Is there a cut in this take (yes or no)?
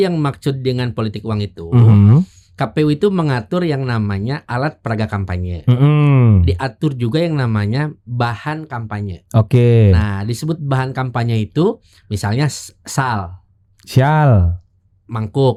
no